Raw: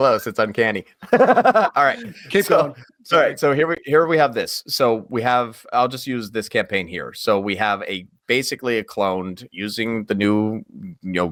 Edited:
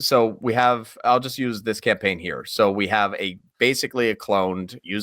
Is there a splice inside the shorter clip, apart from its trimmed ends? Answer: no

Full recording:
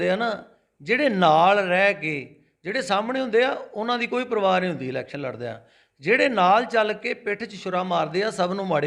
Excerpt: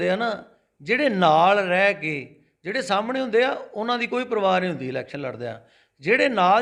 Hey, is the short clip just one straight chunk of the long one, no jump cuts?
yes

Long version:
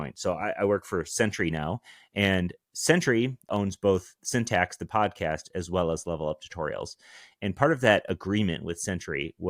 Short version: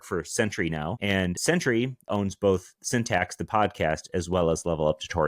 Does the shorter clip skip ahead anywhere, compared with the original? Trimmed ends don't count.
yes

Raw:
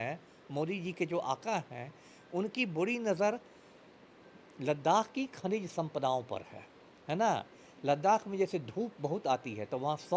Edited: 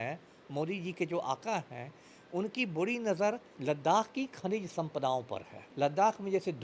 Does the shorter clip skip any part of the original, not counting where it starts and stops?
yes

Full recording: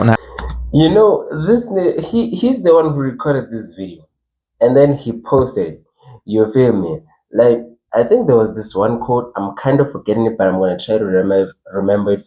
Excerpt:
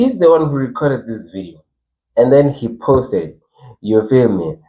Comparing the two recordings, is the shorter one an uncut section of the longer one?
yes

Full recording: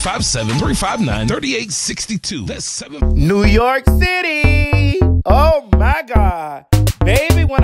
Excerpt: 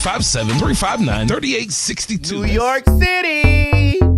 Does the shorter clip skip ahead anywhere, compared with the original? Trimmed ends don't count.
yes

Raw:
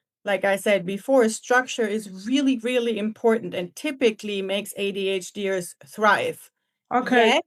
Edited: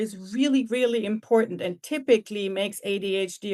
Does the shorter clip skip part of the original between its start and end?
no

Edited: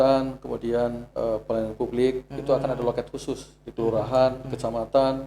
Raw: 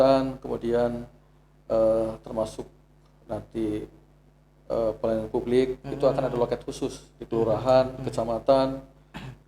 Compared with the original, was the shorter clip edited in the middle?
yes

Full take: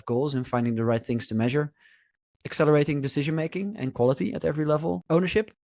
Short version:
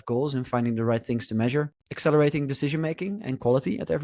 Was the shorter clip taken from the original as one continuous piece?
no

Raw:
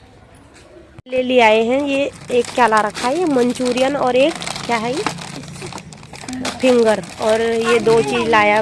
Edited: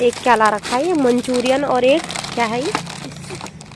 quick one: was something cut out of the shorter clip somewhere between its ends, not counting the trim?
no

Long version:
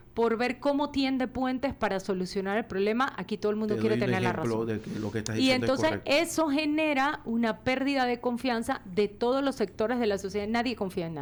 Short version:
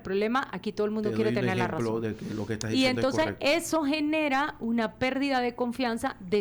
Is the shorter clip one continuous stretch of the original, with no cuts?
yes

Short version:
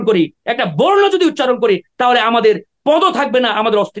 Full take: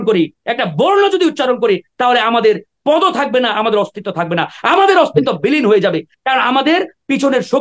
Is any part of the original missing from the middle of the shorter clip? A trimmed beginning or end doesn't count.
no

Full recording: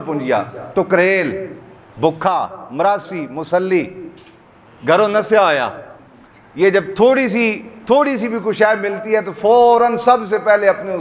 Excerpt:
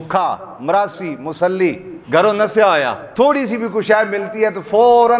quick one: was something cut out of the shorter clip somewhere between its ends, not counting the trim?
yes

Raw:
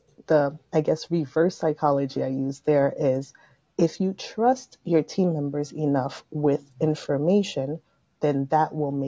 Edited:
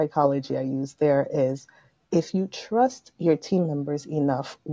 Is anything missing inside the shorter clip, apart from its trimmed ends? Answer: no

